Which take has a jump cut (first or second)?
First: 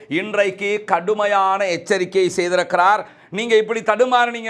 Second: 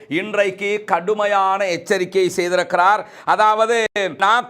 first